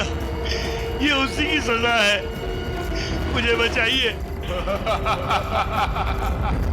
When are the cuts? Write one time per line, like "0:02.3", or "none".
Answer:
none